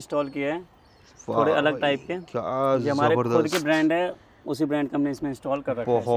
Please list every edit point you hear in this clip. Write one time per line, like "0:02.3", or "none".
none